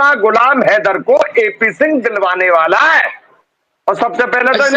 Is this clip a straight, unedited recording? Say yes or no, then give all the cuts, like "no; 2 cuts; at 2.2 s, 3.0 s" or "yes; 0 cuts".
no; 1 cut; at 3.2 s